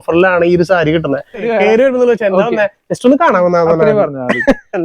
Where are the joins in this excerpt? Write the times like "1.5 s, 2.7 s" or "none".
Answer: 1.5 s